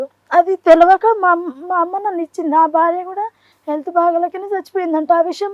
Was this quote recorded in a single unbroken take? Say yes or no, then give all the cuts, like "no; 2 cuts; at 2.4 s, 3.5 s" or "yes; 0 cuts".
yes; 0 cuts